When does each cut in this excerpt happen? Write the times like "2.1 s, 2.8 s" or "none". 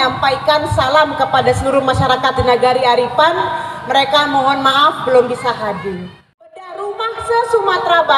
6.7 s